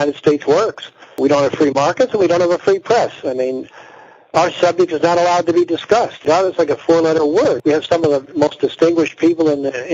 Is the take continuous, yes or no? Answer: no